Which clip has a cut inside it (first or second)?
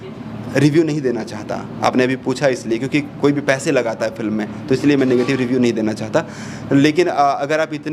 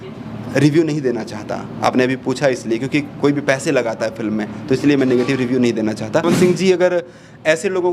second